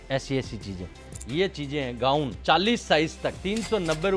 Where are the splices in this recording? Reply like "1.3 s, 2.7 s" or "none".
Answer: 1.1 s, 2.3 s, 3.4 s